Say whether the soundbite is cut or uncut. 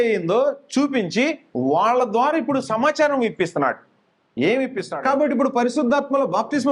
cut